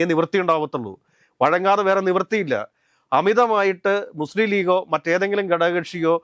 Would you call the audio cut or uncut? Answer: uncut